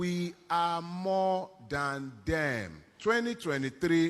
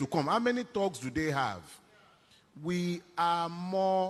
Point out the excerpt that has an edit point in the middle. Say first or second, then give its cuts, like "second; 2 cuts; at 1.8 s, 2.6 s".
first; 1 cut; at 2.8 s